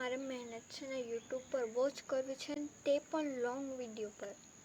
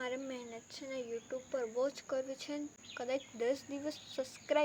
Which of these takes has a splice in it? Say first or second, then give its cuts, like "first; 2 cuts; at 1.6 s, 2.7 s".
second; 1 cut; at 2.7 s